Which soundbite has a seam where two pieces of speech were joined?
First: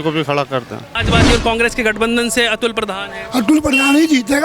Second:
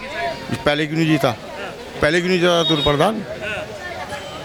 first; 1 cut; at 0.9 s

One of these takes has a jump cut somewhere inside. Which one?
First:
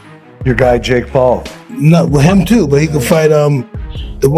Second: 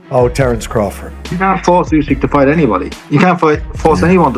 second; 1 cut; at 1.3 s

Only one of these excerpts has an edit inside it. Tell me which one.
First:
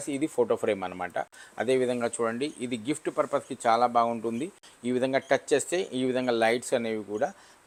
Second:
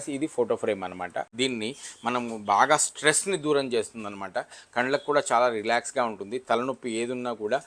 second; 1 cut; at 1.3 s

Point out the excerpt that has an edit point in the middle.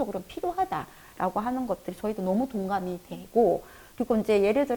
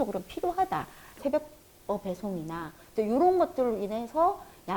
second; 2 cuts; at 1.1 s, 2.8 s

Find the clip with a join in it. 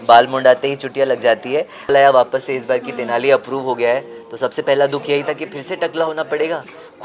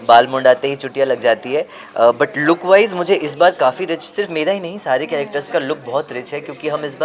first; 1 cut; at 1.9 s

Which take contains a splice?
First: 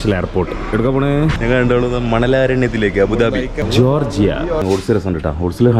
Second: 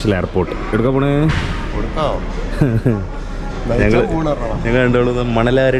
first; 3 cuts; at 1.4 s, 3.6 s, 4.6 s

